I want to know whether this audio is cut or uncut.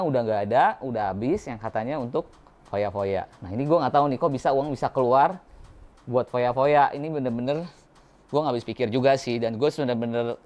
uncut